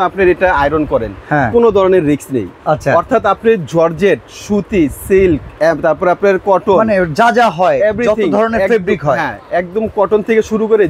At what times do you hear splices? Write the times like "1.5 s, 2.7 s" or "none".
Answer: none